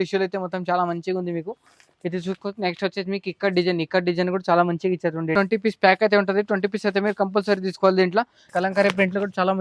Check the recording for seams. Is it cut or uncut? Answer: cut